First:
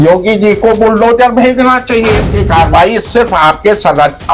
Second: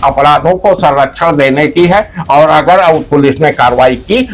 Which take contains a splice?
first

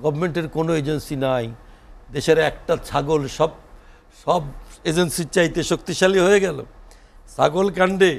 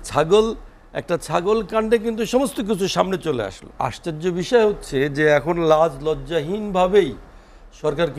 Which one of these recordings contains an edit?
second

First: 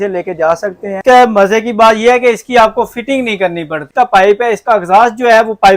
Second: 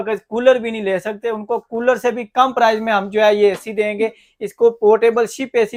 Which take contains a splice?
first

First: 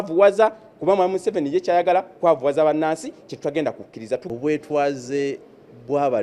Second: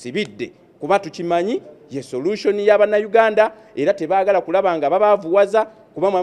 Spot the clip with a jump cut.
first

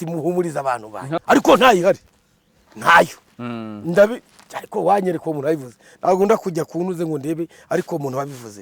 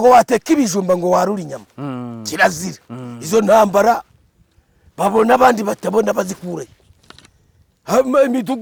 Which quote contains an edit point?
first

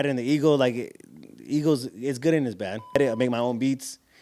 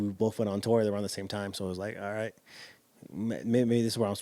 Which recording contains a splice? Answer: first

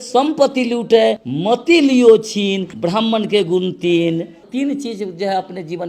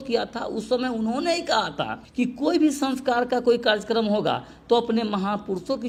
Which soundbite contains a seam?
first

